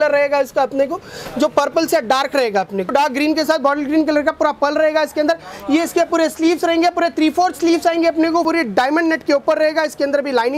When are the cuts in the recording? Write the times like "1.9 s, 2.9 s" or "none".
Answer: 2.9 s, 8.4 s